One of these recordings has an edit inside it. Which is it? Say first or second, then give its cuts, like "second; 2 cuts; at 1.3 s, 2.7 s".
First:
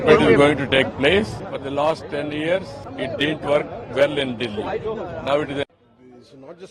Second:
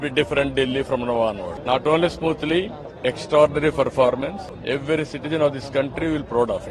first; 1 cut; at 5.7 s